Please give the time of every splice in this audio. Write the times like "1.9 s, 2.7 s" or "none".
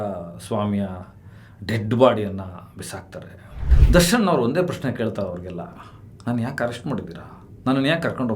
3.7 s